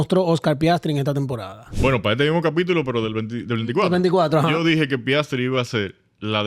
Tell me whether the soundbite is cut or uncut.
cut